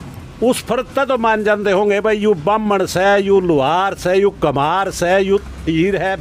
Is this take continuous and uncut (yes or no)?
yes